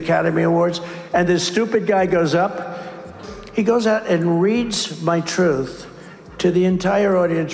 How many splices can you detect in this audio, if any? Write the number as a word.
one